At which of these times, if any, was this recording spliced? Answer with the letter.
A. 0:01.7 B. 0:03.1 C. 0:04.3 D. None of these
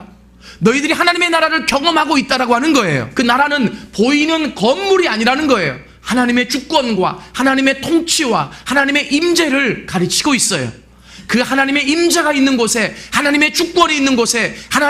B